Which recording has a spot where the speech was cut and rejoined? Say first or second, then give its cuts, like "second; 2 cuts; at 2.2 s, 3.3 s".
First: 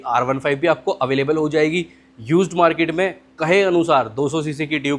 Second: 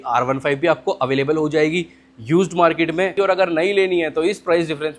second; 1 cut; at 3.1 s